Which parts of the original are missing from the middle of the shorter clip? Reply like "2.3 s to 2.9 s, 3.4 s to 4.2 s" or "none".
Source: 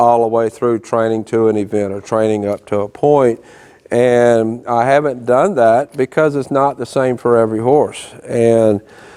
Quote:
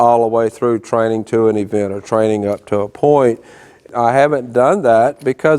3.8 s to 4.6 s